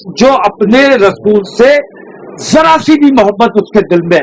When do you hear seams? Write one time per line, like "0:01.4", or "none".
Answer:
none